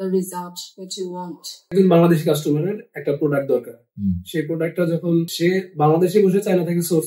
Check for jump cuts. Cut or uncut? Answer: cut